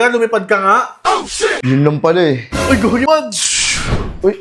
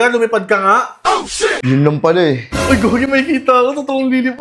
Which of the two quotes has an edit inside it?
first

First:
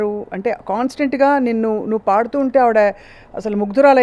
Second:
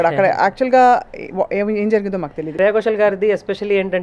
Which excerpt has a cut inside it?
second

